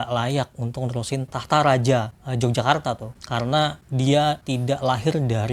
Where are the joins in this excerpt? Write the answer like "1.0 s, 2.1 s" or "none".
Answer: none